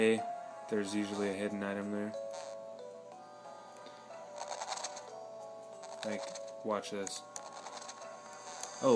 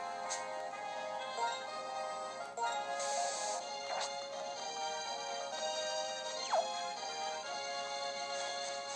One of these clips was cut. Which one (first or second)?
second